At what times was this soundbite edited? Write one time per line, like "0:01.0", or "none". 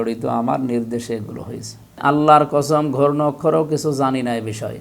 0:02.0